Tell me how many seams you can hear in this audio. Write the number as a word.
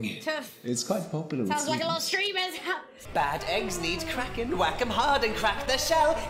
one